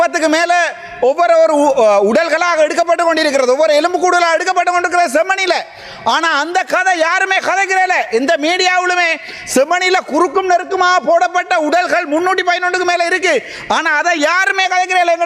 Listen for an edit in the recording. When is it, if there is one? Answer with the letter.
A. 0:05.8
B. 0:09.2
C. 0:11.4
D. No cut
D